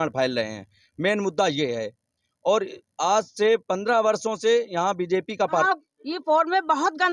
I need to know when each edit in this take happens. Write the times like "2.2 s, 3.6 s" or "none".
5.6 s